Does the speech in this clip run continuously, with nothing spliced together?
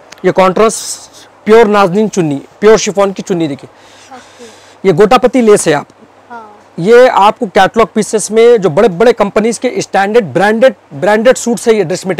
yes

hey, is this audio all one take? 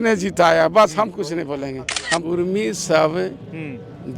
no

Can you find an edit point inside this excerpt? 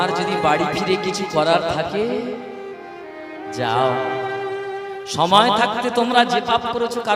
no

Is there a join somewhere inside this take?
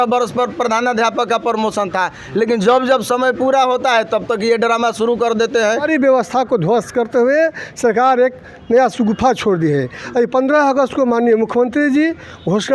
yes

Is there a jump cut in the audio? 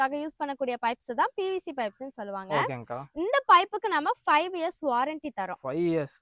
no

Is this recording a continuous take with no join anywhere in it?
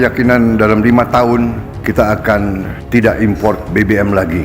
no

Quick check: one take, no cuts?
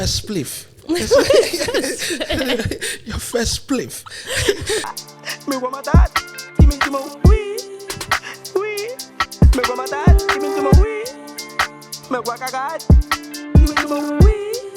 no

